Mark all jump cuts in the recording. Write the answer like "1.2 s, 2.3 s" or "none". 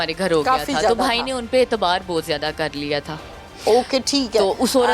none